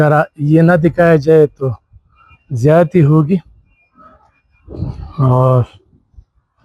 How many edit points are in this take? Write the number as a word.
zero